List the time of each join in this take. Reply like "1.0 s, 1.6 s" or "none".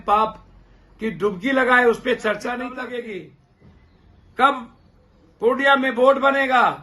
2.7 s